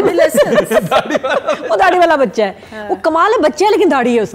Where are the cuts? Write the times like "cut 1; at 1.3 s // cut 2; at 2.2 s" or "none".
none